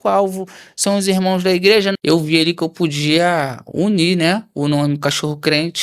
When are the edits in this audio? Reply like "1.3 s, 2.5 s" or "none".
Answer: 1.9 s